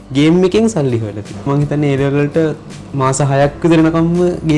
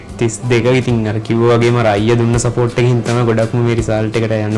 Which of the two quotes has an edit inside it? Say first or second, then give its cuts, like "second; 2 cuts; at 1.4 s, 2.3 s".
first; 1 cut; at 1.5 s